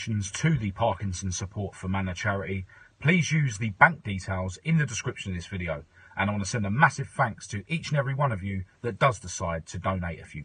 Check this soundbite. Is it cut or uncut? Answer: uncut